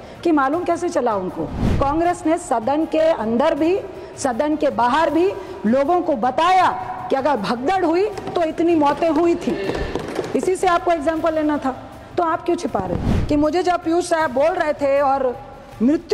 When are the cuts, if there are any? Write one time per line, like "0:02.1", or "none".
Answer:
0:01.8
0:13.1

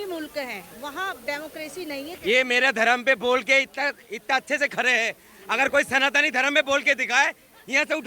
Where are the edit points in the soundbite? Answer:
0:01.7

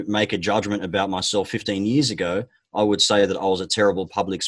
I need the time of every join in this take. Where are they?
none

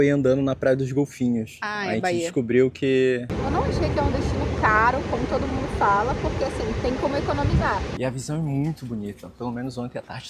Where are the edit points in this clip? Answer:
0:03.3
0:07.9

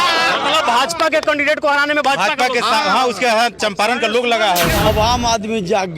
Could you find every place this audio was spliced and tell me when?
0:04.9

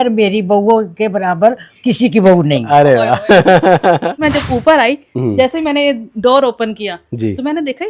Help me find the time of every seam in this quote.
0:04.2

